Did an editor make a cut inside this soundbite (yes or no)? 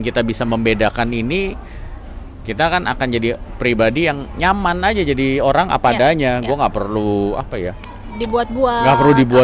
no